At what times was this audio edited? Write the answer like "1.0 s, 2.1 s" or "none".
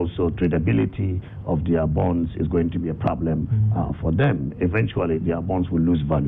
none